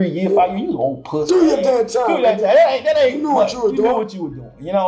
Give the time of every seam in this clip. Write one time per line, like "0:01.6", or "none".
none